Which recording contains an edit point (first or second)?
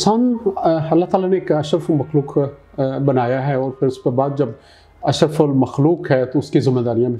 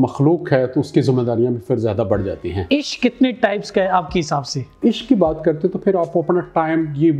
second